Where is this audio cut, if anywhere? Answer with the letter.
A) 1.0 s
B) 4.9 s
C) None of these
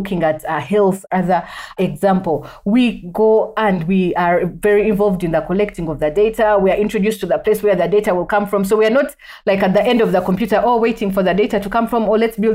C